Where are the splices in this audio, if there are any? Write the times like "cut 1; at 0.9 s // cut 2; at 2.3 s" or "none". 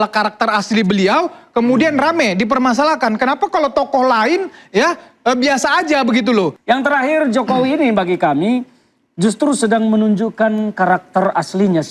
cut 1; at 6.6 s